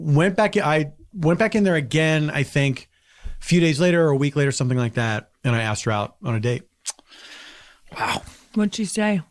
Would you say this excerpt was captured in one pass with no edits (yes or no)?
yes